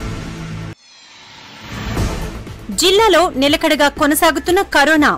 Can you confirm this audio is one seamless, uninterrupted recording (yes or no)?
no